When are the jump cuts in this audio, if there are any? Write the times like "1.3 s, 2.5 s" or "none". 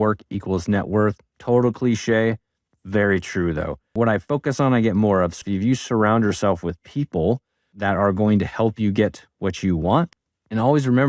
3.9 s, 5.4 s, 10.2 s